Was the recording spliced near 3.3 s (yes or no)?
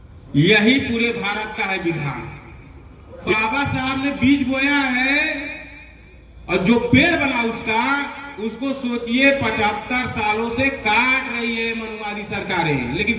yes